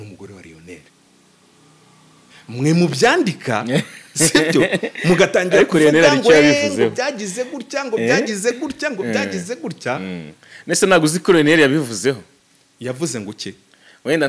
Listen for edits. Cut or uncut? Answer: uncut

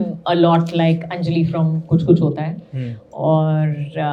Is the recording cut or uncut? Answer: uncut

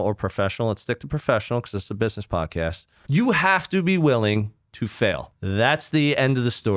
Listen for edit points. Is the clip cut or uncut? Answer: cut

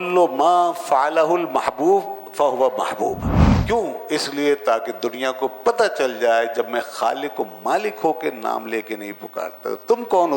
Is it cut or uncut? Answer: cut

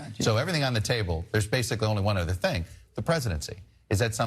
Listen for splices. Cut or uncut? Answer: uncut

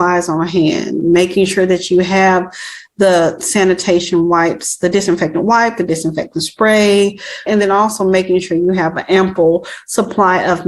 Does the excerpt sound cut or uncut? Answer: uncut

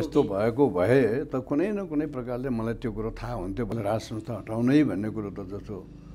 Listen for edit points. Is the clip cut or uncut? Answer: cut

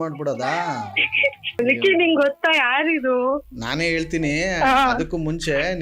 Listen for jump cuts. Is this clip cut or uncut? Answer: cut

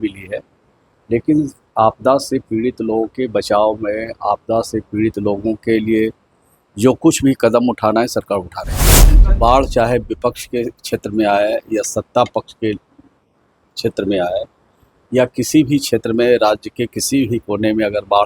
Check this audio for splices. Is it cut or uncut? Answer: cut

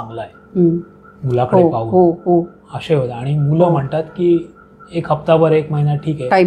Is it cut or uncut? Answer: uncut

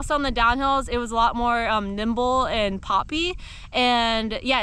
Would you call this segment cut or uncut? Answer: uncut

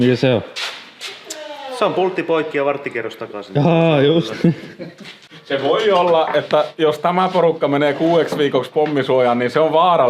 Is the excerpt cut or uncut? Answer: cut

